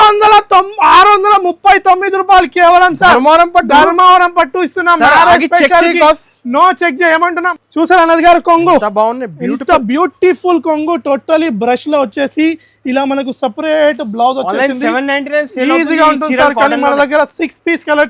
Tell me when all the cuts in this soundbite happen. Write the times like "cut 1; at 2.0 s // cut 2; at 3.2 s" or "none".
cut 1; at 7.5 s

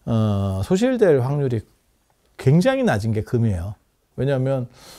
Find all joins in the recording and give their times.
cut 1; at 4.0 s

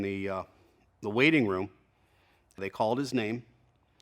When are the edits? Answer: cut 1; at 2.6 s

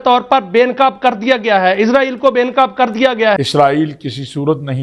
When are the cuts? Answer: none

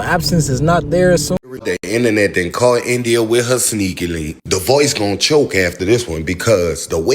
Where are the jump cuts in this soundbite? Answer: cut 1; at 1.4 s

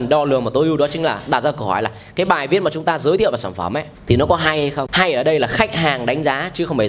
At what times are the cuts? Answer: cut 1; at 3.9 s // cut 2; at 4.9 s

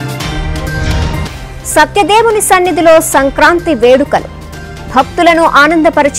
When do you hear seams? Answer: cut 1; at 1.2 s

